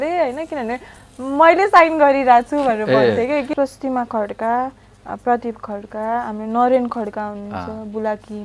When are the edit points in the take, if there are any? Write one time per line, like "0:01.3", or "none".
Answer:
0:03.5